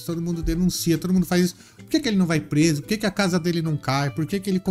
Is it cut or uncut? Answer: uncut